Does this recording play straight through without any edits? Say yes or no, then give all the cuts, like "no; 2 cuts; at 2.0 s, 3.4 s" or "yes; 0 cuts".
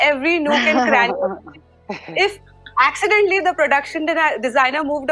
yes; 0 cuts